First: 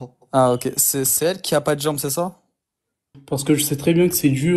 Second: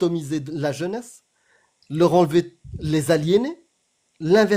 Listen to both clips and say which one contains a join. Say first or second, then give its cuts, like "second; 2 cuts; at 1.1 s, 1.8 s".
first; 1 cut; at 3.2 s